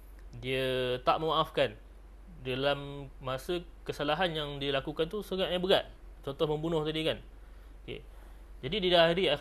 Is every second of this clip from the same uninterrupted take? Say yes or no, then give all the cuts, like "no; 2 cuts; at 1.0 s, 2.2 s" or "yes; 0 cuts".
yes; 0 cuts